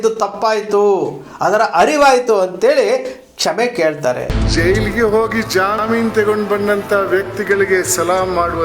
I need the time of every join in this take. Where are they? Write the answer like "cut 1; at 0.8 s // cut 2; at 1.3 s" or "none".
cut 1; at 4.3 s